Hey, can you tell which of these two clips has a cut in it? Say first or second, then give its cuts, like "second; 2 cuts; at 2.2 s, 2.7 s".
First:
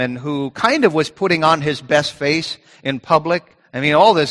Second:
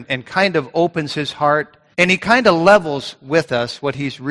second; 1 cut; at 1.8 s